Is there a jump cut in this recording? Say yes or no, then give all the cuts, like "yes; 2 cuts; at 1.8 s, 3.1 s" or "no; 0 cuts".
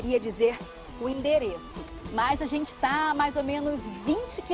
no; 0 cuts